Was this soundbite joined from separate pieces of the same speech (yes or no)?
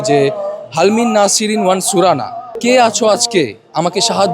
yes